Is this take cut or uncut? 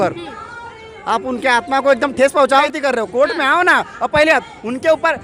cut